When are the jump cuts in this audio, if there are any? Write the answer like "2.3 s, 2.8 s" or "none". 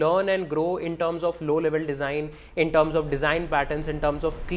none